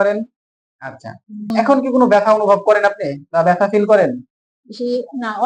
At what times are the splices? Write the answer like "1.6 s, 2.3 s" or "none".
1.5 s